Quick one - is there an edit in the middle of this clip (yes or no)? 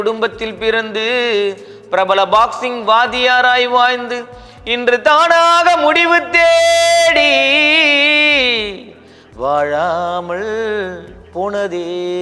no